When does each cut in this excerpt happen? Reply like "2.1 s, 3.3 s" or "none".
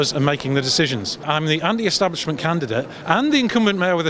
1.3 s